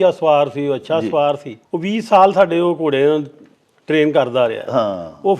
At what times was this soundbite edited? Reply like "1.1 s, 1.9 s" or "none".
1.6 s